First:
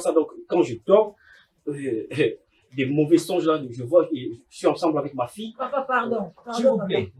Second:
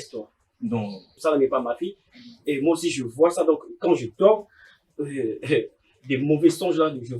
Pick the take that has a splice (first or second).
second